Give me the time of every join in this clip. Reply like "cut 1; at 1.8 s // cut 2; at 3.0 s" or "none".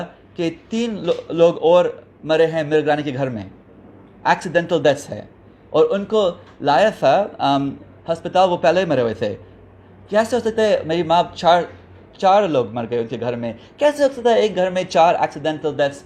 none